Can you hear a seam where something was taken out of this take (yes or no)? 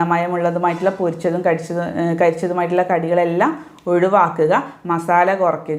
no